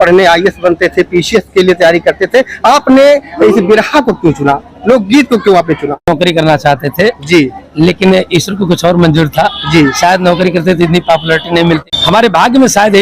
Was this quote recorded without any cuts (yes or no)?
no